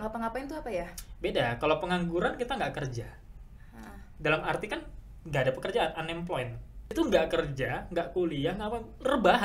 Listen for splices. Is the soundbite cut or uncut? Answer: cut